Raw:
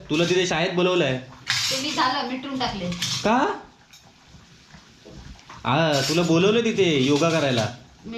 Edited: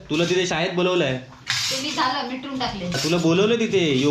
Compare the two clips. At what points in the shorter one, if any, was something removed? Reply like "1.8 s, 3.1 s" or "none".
3.0 s